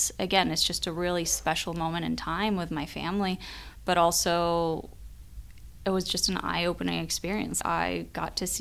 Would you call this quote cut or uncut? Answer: uncut